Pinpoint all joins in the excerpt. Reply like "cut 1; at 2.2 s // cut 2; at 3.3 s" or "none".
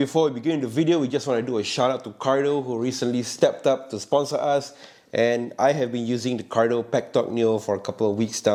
none